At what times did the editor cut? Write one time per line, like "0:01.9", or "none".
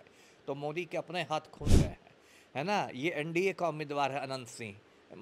0:01.7